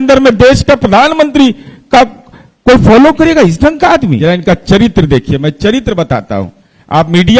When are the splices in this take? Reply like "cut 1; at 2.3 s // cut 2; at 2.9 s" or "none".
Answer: cut 1; at 4.2 s

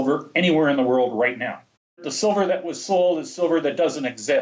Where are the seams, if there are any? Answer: cut 1; at 2.1 s

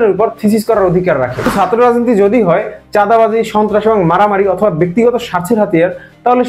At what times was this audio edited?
cut 1; at 1.5 s

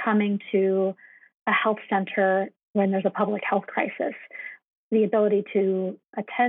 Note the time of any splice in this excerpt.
cut 1; at 2.6 s // cut 2; at 4.6 s

